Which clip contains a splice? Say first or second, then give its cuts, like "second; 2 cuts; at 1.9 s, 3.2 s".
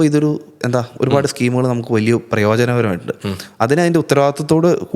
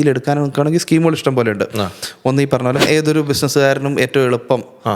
second; 1 cut; at 2.8 s